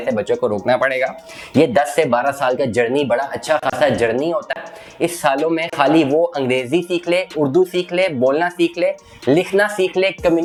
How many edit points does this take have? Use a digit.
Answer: 0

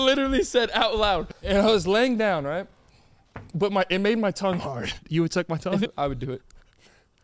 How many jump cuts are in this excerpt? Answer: 3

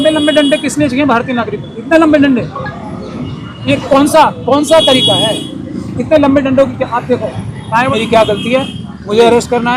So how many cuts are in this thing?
1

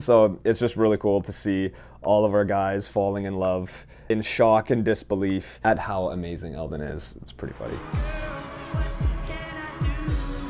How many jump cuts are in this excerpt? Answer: 0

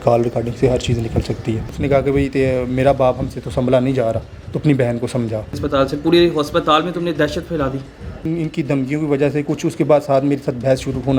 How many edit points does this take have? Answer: 3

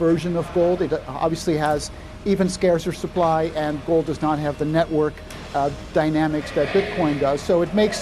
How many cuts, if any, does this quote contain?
0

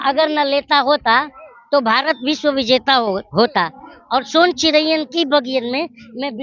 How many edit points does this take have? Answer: 0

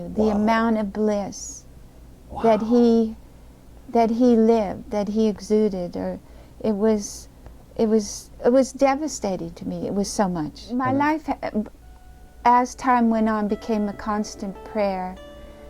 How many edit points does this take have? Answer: 1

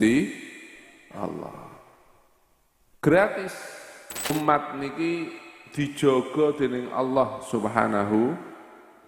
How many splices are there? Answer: 1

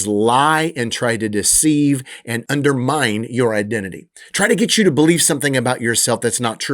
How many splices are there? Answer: 1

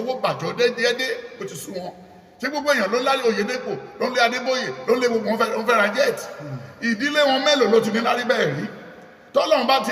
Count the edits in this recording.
0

